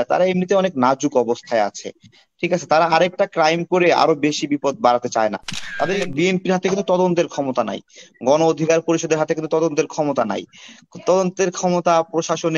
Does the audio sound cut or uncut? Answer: cut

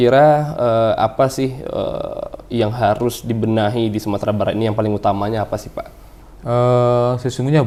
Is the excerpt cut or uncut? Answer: uncut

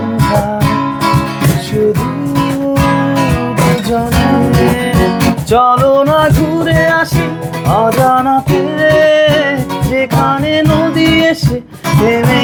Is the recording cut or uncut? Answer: uncut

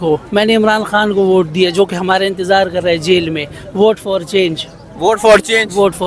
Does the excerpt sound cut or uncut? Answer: uncut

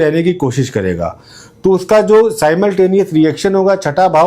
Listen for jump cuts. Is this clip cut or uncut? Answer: uncut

